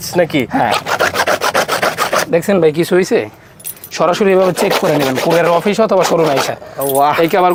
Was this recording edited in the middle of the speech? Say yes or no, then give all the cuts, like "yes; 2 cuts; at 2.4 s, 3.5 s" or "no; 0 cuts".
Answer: no; 0 cuts